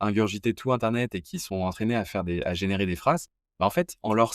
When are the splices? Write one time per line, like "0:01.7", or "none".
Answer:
0:03.4